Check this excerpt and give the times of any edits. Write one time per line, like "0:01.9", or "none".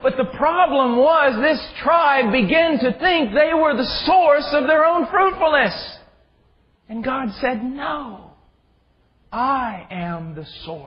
0:07.7